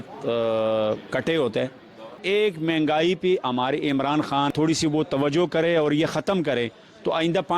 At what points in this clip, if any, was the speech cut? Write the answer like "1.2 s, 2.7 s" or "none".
2.2 s, 4.5 s